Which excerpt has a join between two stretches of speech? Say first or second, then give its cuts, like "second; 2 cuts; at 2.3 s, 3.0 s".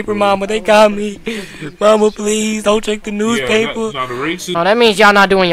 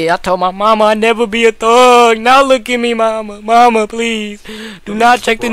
first; 1 cut; at 4.5 s